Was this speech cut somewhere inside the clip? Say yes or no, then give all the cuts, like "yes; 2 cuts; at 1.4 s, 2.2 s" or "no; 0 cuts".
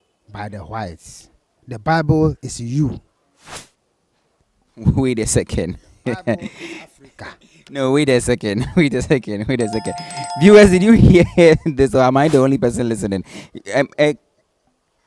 no; 0 cuts